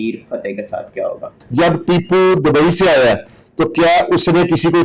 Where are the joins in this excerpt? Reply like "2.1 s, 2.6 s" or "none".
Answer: 1.4 s